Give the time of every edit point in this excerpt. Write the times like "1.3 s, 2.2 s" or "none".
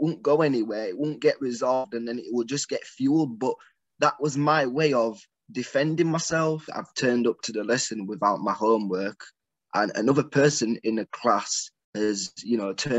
6.8 s

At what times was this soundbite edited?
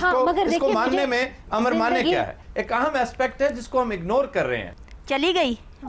4.7 s

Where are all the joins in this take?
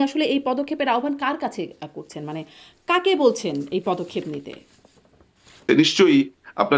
none

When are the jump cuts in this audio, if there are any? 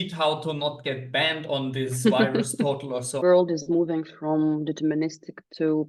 3.2 s

